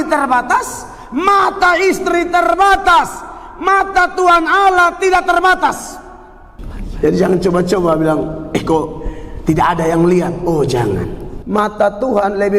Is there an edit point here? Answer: yes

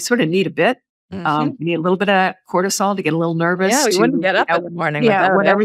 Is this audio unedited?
yes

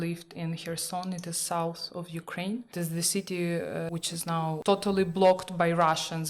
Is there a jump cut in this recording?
yes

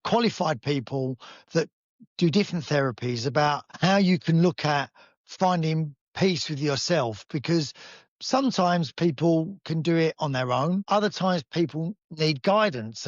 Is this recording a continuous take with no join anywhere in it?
no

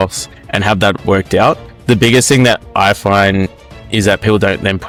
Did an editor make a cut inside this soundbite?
no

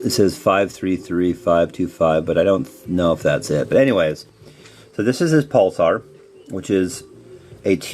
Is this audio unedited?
no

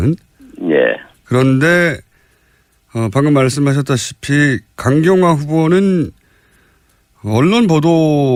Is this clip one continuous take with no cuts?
yes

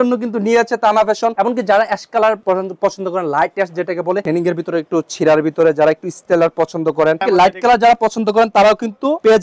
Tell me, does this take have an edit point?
yes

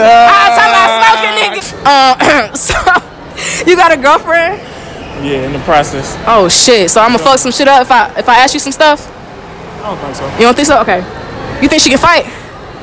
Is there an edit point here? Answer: yes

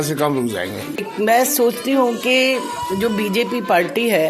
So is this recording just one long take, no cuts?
no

